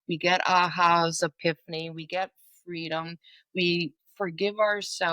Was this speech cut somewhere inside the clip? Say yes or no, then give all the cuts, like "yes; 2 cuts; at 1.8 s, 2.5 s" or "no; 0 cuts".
yes; 1 cut; at 4.0 s